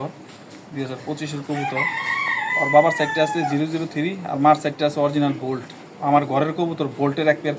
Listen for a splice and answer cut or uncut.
uncut